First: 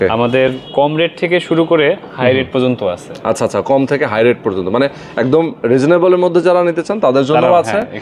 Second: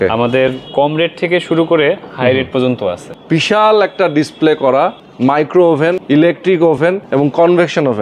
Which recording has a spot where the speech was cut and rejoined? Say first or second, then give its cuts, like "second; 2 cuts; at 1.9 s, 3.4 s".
second; 4 cuts; at 3.1 s, 5.0 s, 6.0 s, 6.8 s